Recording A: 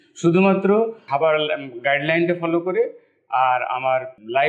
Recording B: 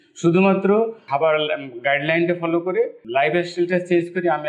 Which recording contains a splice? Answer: B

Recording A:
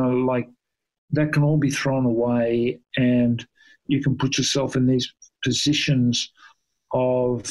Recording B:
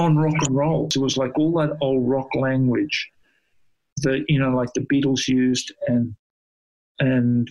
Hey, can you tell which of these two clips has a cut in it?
B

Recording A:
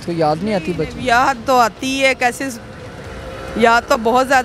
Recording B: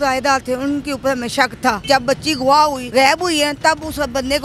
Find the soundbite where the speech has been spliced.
B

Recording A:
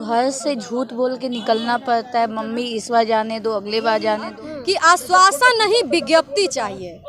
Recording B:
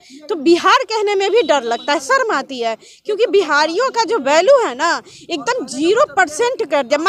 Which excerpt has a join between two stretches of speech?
A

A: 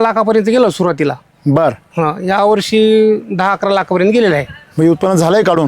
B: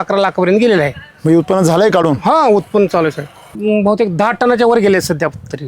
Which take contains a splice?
B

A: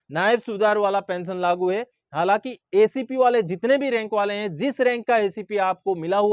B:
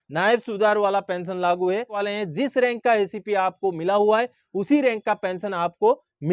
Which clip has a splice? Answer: B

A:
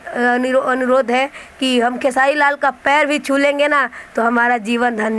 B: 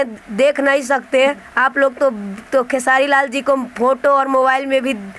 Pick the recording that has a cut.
B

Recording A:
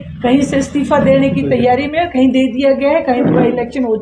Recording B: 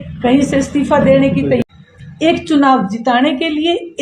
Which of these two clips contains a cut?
B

